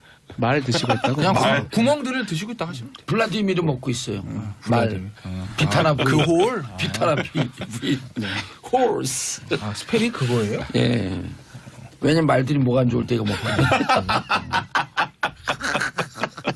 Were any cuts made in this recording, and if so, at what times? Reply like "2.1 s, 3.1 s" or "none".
none